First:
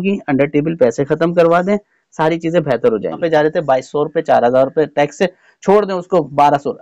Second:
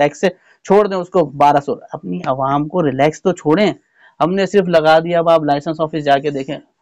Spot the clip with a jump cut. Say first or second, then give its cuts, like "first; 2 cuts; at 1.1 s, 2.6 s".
first; 1 cut; at 3.2 s